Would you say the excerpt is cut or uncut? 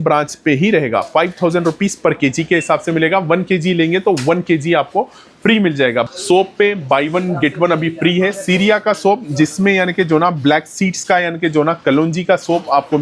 cut